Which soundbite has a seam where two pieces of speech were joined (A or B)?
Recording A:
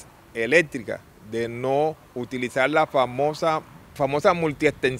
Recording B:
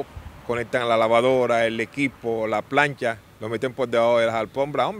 A